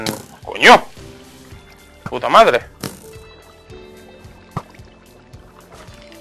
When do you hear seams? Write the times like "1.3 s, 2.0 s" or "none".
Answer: 2.7 s